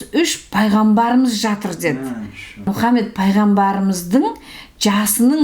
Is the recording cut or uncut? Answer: cut